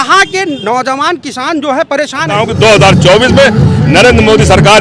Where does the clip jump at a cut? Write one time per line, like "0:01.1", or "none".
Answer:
0:02.5